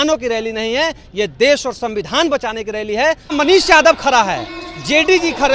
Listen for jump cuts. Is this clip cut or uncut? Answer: cut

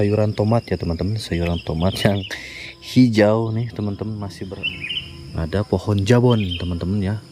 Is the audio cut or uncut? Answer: cut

